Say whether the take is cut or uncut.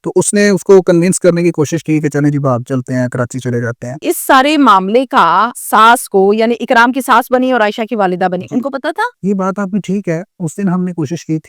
cut